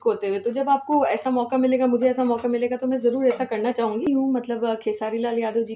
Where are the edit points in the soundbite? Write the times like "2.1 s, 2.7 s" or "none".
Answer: 4.1 s